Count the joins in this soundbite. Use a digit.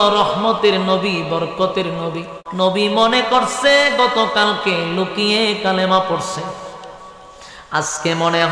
1